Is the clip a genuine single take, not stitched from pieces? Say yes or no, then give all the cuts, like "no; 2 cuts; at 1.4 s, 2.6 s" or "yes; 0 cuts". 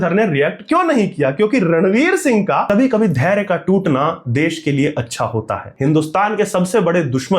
no; 2 cuts; at 2.6 s, 5.7 s